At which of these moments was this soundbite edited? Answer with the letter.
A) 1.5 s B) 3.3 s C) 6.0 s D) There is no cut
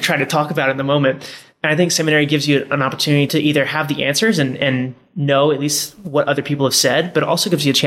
B